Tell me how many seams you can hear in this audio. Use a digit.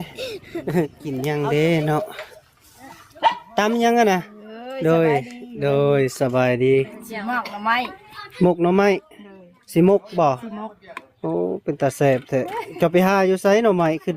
1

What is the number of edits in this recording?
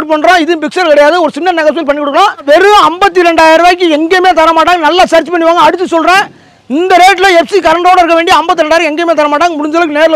1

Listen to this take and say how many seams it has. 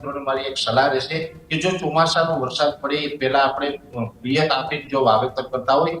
0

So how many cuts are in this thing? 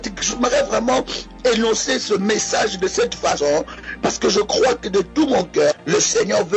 1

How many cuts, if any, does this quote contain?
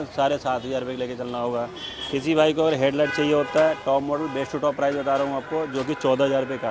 0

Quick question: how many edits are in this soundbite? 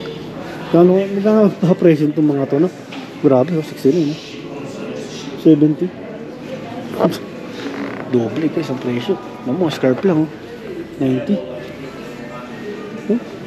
0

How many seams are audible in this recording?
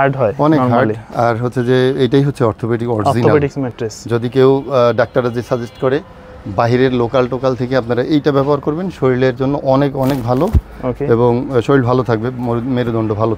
0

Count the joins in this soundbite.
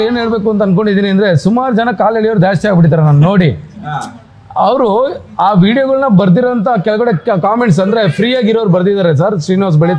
0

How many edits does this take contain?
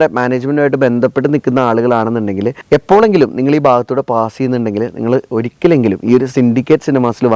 0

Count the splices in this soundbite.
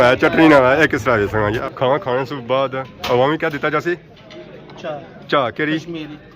1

